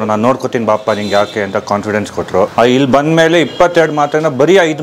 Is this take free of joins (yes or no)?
no